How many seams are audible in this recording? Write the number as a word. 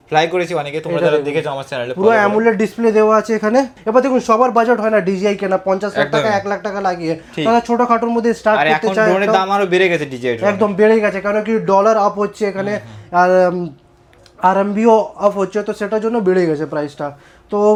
zero